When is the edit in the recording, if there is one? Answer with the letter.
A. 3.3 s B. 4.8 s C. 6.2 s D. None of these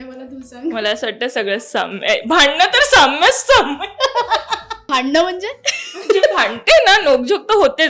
B